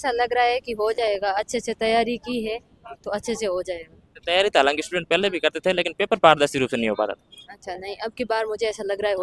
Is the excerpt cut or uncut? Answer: uncut